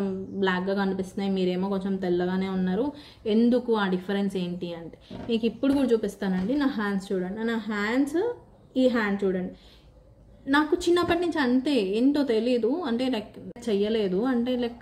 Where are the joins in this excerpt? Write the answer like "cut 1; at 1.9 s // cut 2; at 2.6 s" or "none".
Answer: cut 1; at 13.6 s